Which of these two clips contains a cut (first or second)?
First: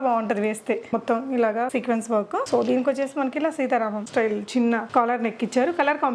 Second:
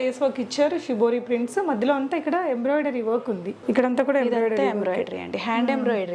first